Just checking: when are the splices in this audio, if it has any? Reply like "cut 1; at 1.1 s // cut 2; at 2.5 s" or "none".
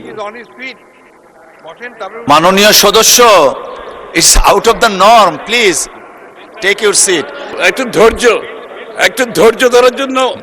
cut 1; at 7.6 s